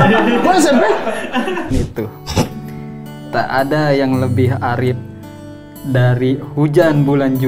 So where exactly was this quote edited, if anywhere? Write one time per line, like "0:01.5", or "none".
0:01.7